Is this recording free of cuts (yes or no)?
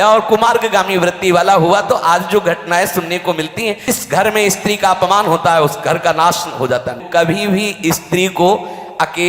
no